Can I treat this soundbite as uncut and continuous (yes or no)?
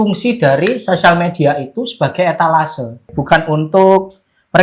no